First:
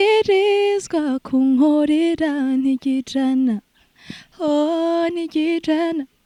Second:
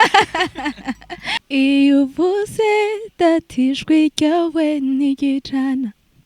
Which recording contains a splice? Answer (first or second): second